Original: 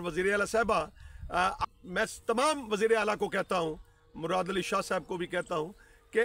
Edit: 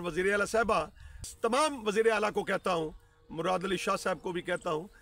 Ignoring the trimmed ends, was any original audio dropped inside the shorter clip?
yes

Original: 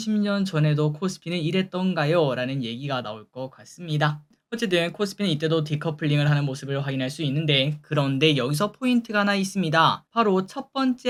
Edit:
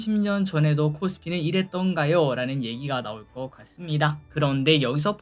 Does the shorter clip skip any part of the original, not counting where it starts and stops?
yes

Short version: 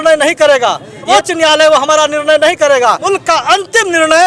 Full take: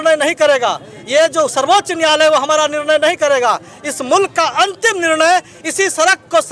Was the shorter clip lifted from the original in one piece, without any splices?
no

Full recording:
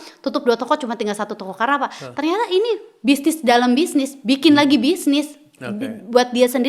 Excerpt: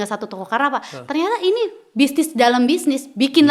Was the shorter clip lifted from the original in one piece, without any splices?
yes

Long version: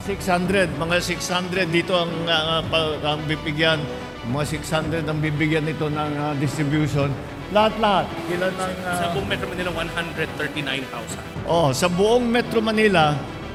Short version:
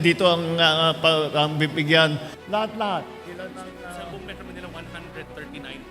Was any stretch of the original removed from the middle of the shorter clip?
yes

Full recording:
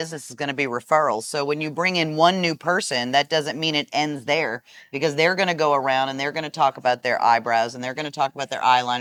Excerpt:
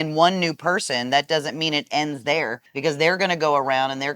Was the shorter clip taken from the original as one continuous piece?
no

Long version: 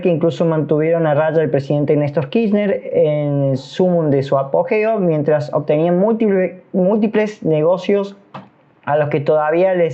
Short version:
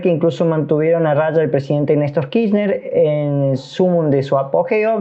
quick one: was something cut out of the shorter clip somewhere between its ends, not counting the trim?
no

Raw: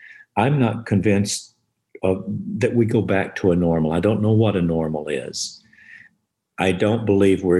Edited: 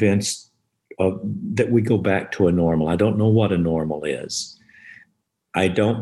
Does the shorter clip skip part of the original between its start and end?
no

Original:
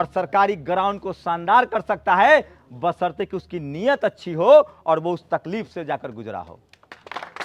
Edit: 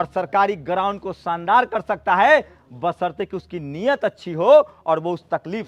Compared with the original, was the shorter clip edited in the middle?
no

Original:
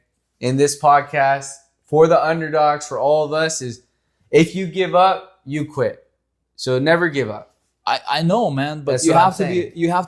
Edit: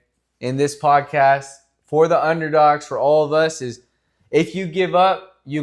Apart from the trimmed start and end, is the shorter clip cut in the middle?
no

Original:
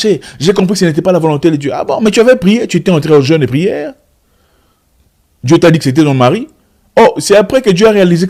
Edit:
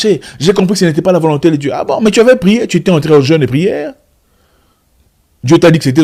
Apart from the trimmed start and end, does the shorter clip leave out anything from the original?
no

